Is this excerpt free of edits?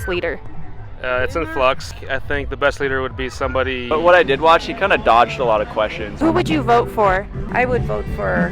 no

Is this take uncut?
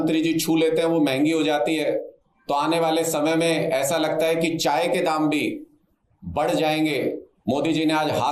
yes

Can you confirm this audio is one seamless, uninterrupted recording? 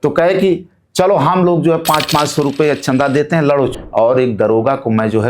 no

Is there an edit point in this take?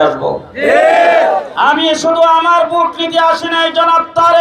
yes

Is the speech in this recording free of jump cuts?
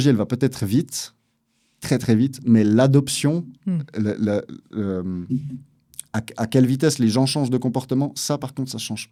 yes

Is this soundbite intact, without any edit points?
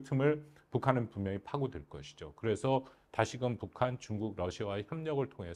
yes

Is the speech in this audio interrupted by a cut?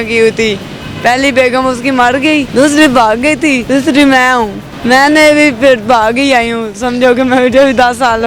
yes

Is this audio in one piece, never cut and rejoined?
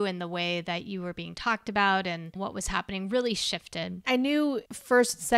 no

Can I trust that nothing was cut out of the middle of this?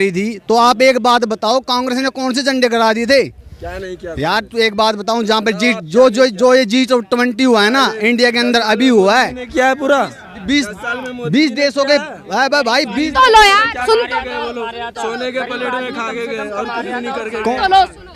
yes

